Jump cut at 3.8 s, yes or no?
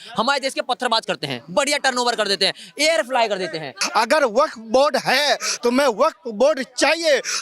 yes